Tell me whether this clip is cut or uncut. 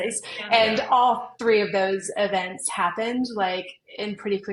uncut